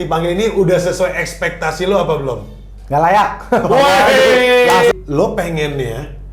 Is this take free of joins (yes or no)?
no